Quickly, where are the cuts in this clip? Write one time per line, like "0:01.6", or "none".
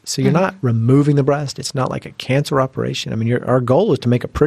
none